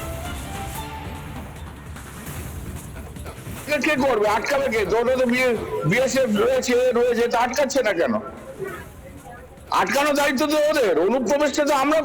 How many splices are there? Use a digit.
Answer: 3